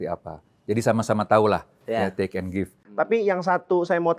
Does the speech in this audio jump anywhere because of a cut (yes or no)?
yes